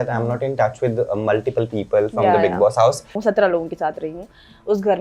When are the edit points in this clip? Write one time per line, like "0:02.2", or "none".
0:03.1